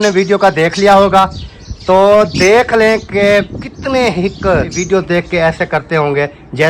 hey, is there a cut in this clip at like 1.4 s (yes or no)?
no